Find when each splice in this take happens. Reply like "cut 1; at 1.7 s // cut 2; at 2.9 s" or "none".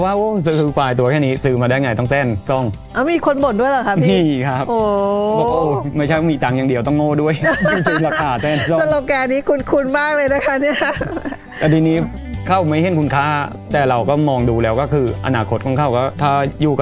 none

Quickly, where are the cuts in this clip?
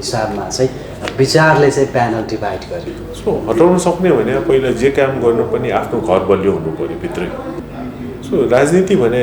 cut 1; at 3.0 s // cut 2; at 7.5 s

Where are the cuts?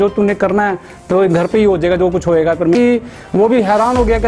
cut 1; at 2.7 s

